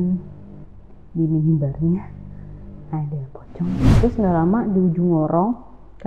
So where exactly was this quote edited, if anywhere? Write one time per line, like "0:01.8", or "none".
0:03.9

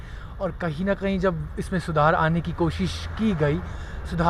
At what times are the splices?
none

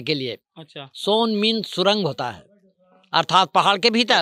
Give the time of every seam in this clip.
none

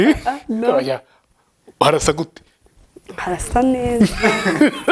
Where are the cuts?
none

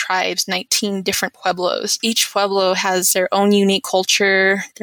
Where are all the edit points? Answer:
0:01.9

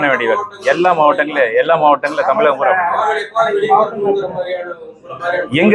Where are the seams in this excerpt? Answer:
none

